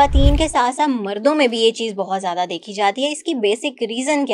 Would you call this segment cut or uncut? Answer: uncut